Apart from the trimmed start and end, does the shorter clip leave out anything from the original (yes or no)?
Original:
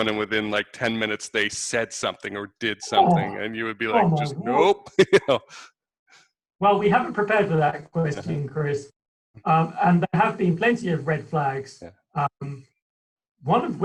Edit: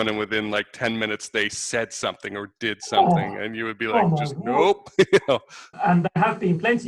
yes